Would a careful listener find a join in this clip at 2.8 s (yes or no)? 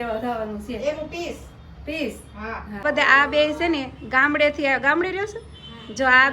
yes